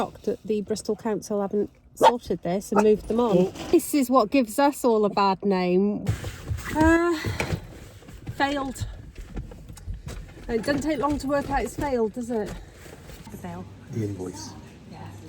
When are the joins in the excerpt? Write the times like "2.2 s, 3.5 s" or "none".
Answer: 3.7 s, 6.0 s, 13.3 s